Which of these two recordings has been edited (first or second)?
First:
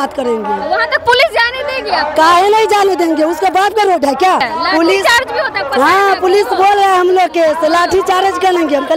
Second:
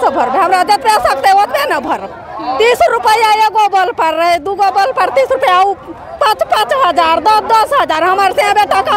first